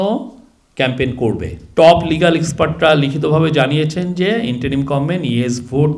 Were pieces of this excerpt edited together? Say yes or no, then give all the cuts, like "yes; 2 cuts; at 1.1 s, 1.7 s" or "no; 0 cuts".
yes; 1 cut; at 1.5 s